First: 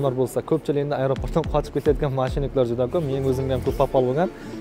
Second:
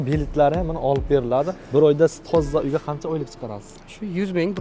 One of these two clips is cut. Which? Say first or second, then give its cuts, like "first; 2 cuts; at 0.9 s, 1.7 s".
second; 1 cut; at 1.6 s